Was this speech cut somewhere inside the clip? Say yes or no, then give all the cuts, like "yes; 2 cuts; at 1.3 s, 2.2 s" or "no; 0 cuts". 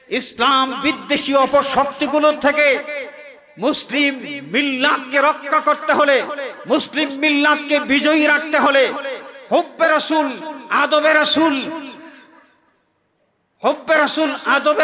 no; 0 cuts